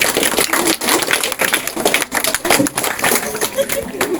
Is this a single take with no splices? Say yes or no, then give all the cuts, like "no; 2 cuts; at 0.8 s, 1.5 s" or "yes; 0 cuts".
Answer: yes; 0 cuts